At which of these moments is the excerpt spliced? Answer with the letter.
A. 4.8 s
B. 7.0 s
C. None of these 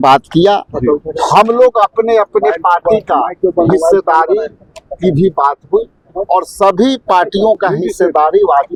C